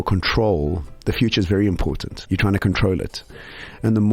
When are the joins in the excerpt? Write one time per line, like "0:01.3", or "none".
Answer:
0:02.1